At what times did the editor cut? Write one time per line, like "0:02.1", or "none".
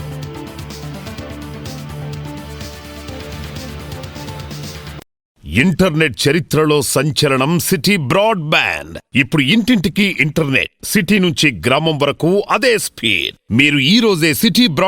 0:05.3